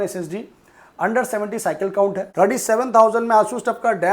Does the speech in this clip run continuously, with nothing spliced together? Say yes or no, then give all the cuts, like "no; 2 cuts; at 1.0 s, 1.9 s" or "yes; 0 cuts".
no; 1 cut; at 2.2 s